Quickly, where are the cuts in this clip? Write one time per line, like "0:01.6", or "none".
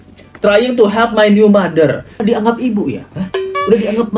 0:02.2

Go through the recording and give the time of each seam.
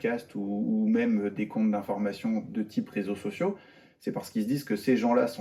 none

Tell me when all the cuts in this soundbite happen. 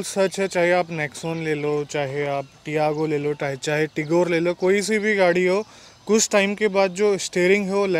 none

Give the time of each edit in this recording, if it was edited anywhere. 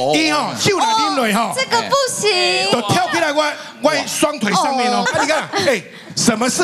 0:05.1

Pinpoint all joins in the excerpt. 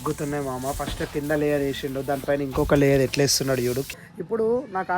0:03.9

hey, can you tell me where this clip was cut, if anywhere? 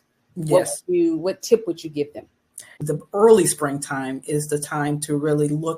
0:02.8

